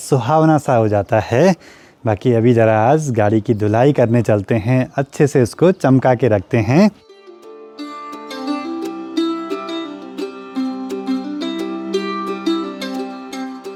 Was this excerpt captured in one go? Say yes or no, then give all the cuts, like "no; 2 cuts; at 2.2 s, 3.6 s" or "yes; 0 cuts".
yes; 0 cuts